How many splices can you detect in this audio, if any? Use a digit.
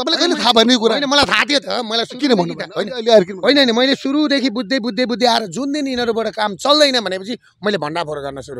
0